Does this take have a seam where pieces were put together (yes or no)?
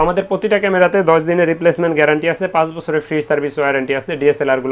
no